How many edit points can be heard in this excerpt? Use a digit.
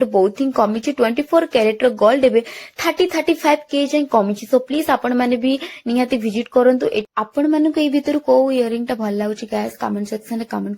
1